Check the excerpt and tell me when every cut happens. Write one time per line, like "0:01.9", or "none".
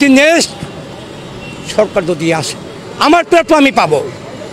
none